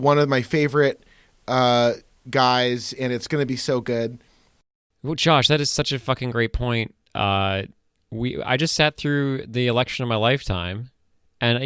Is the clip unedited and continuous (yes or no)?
no